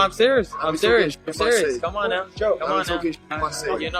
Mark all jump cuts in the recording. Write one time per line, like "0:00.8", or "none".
0:02.5